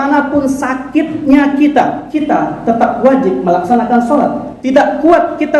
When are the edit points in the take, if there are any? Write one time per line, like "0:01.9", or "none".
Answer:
0:02.0
0:04.5